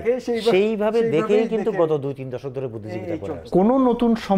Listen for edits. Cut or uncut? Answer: cut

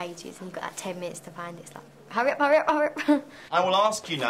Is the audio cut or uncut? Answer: cut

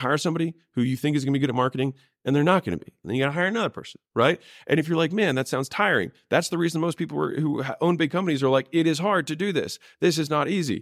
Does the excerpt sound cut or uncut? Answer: cut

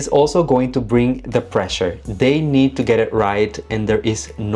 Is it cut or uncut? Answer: uncut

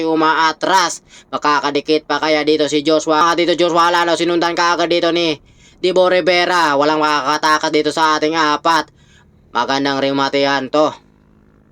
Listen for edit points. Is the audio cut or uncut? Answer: cut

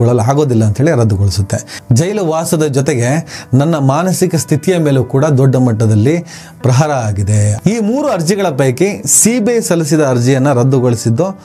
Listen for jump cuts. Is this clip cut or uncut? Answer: cut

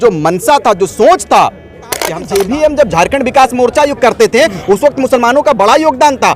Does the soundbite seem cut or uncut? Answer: cut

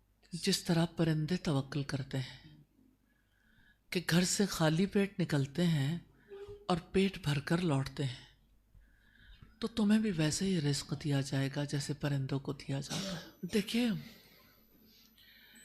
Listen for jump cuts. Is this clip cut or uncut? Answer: cut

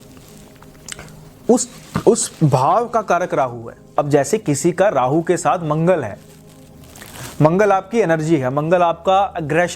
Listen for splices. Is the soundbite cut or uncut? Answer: cut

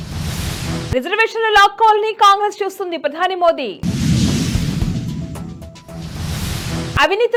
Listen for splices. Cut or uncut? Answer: uncut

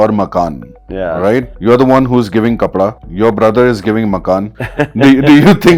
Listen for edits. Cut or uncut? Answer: cut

